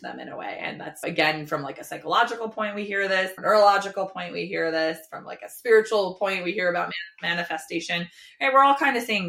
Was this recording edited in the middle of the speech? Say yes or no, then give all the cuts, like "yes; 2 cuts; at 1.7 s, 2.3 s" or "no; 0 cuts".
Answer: yes; 1 cut; at 1.0 s